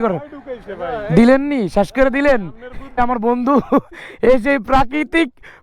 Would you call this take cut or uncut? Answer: cut